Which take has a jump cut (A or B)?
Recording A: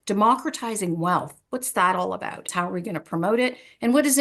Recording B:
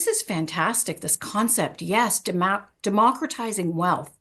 A